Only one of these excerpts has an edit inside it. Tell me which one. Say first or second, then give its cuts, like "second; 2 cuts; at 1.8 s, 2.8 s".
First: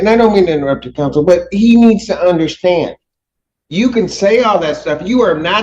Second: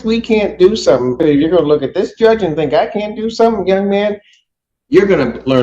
second; 1 cut; at 1.2 s